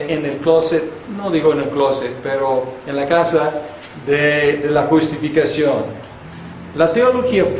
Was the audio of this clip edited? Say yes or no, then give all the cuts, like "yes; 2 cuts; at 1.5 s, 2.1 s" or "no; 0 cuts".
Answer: no; 0 cuts